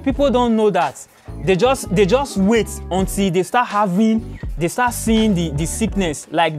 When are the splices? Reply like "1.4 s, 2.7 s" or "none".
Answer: none